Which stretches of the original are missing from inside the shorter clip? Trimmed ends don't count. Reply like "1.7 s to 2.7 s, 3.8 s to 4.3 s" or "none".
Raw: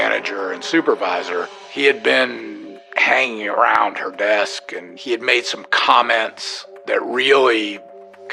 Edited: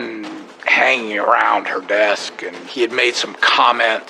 none